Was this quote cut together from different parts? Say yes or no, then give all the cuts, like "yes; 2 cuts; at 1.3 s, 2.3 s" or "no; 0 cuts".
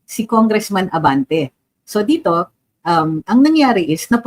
no; 0 cuts